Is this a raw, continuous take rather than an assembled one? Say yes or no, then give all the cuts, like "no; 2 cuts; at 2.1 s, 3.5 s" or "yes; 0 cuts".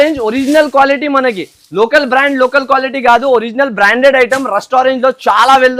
yes; 0 cuts